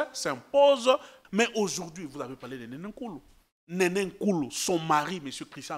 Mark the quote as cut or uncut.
cut